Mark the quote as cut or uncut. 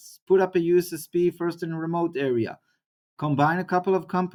uncut